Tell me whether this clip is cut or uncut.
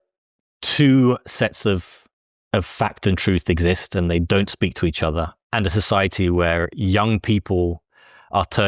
cut